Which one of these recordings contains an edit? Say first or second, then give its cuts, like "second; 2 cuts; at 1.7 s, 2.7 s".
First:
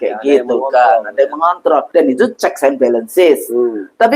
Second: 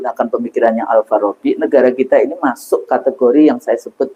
first; 1 cut; at 1.9 s